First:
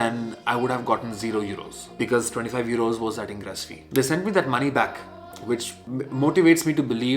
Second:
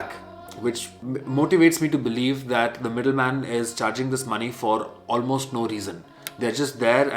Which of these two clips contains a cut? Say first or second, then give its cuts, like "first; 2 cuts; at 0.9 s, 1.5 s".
first; 1 cut; at 3.8 s